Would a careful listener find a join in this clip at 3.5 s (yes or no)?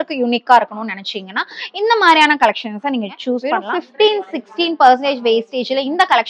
yes